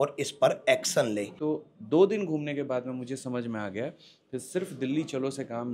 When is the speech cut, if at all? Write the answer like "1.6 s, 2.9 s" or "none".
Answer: 1.3 s